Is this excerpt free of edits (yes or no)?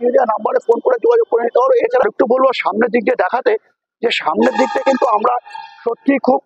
no